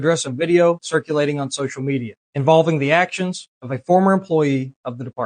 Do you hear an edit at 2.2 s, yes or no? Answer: yes